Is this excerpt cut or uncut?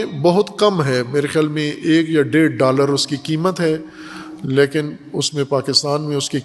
uncut